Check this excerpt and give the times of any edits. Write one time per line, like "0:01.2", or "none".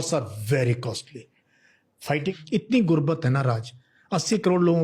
0:02.3